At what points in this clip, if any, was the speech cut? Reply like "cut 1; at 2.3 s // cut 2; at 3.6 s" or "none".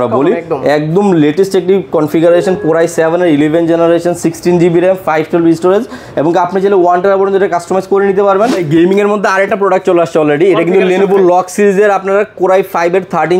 cut 1; at 8.6 s